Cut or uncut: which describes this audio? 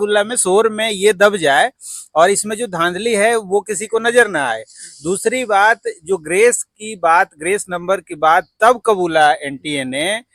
uncut